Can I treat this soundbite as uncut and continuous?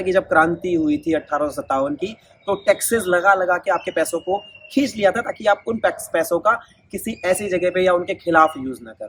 yes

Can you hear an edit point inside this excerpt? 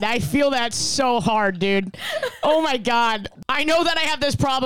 yes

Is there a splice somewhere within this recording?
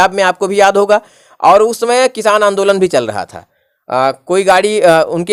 no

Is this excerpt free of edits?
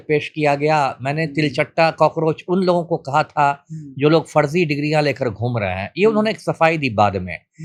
yes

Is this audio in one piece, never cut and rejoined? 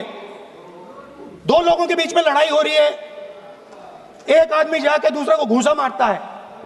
yes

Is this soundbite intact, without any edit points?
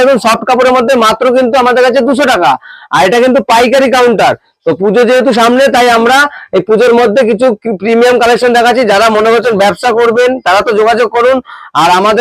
yes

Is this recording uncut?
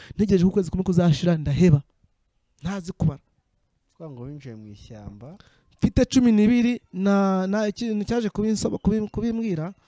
yes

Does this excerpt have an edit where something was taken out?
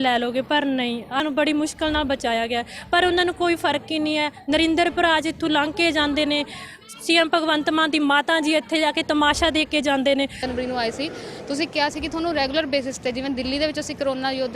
yes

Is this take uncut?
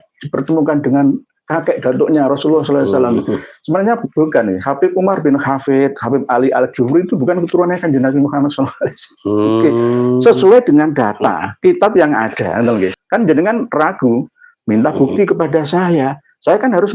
no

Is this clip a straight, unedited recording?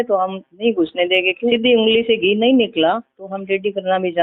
no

